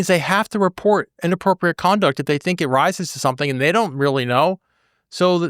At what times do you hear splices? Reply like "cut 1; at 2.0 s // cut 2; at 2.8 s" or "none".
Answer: none